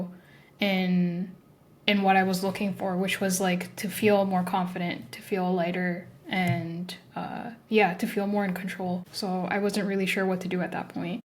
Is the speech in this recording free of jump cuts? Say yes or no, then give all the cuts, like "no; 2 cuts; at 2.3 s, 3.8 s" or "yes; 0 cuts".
no; 1 cut; at 9.1 s